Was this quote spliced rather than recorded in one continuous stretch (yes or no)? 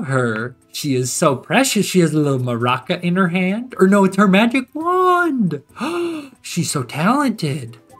no